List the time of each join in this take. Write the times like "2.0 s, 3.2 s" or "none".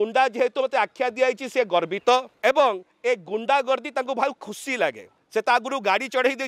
2.3 s, 5.1 s

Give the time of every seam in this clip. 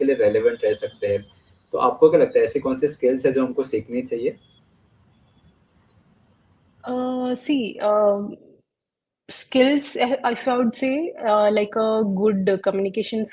none

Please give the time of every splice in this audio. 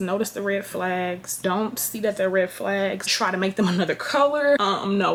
none

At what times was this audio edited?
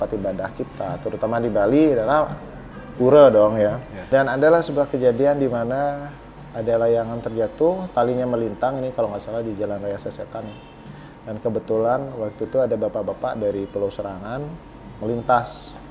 3.9 s

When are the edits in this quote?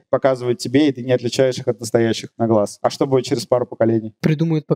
none

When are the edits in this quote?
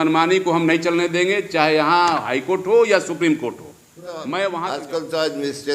4.7 s

